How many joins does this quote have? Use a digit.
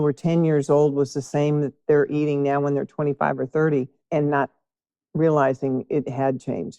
1